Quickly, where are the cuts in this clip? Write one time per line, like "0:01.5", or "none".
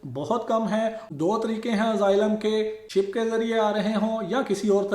0:01.0
0:02.9